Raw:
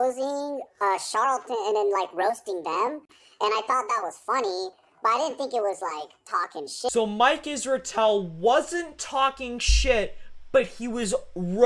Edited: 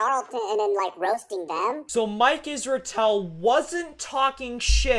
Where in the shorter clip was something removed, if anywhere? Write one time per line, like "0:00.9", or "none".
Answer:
0:01.9